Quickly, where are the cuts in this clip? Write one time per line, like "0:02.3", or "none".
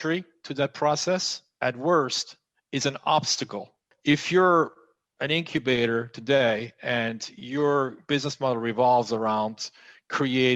0:03.9